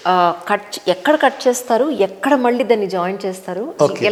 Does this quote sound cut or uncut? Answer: uncut